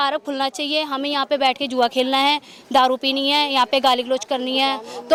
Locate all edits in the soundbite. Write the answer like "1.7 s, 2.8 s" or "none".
none